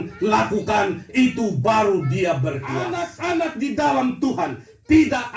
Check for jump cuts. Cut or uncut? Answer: cut